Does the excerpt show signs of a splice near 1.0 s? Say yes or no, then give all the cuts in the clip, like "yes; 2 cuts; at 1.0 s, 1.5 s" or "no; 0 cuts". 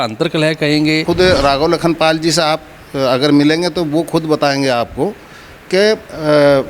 yes; 1 cut; at 1.0 s